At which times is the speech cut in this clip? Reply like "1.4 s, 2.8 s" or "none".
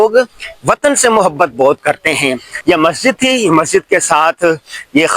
2.5 s